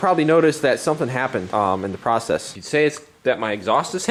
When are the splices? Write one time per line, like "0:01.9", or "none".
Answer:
none